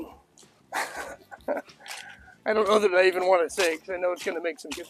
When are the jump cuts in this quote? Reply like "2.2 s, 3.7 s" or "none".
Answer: none